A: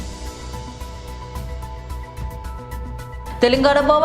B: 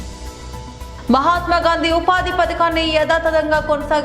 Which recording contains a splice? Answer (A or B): A